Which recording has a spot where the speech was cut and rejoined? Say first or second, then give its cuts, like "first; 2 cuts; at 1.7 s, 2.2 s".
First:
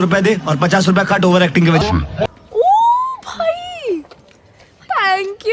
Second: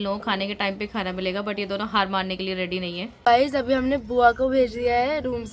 second; 1 cut; at 3.1 s